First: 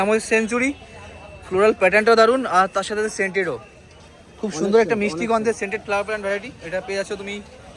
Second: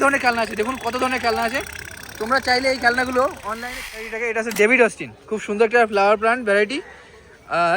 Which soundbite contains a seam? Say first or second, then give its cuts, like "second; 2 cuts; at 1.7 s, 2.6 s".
second; 1 cut; at 4.0 s